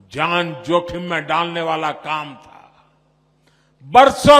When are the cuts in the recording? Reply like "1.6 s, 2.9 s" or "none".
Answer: none